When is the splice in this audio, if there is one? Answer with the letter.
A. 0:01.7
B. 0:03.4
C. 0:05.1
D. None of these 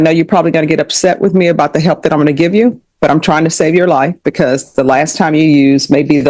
D